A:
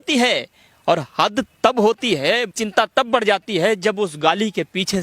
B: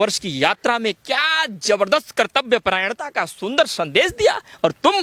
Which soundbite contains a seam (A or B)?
A